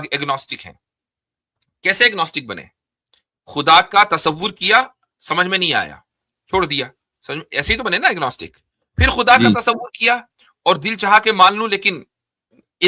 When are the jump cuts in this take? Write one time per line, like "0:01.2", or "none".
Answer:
none